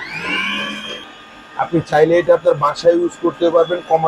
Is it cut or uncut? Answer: cut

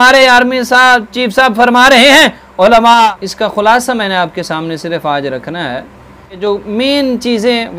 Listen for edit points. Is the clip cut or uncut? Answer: cut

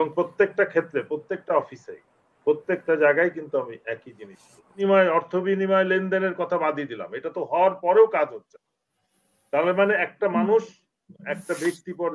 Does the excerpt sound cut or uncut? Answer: cut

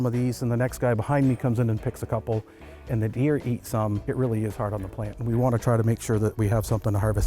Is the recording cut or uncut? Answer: uncut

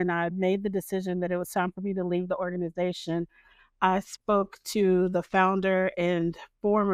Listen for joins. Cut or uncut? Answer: uncut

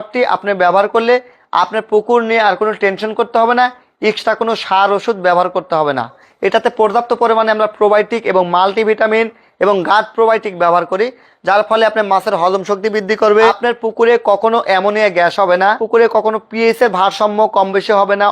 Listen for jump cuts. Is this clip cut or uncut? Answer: cut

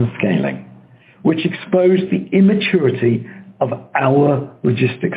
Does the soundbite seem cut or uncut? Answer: uncut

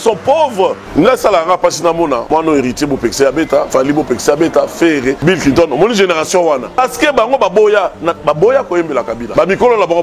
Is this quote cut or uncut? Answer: cut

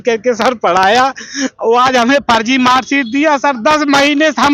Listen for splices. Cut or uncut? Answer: uncut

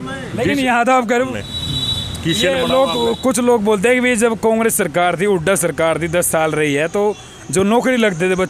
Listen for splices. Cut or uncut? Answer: cut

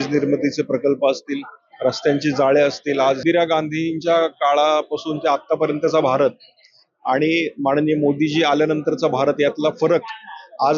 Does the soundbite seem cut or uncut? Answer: cut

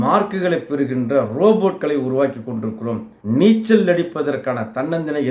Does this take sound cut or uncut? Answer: cut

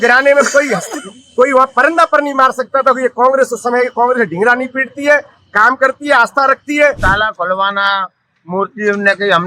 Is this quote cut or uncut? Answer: cut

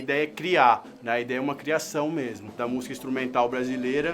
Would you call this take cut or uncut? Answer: cut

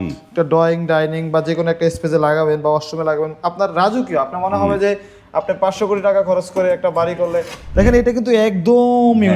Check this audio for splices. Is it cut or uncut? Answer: cut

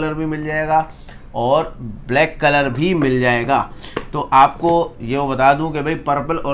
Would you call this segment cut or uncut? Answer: uncut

